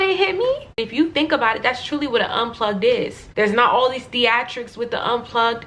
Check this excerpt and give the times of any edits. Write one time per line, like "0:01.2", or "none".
0:00.8
0:03.2

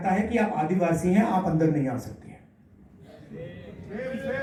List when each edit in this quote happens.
none

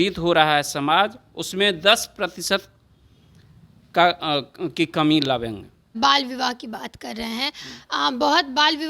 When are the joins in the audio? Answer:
0:05.9

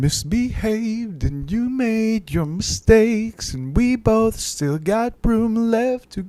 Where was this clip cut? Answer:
none

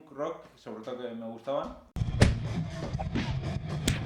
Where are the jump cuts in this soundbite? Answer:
0:01.9

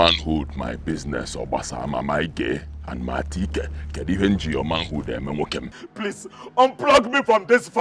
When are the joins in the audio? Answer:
0:05.8

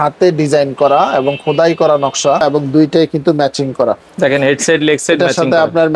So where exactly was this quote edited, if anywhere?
0:02.6

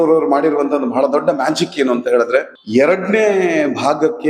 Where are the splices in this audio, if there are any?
0:02.6

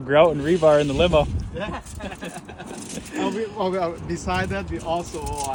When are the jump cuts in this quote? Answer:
none

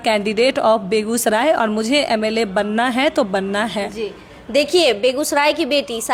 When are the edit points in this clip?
none

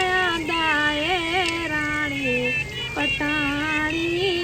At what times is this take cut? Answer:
none

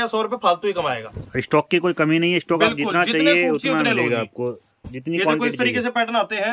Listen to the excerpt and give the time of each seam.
none

